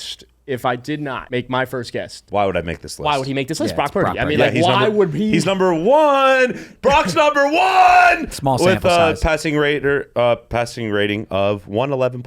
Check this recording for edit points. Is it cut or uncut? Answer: cut